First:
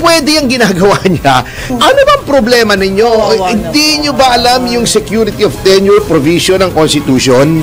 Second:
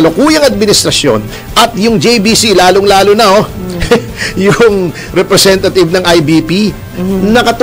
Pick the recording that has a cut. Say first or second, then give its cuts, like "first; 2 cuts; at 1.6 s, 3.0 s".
first; 1 cut; at 1.7 s